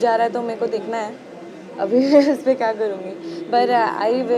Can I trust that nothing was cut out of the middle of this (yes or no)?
yes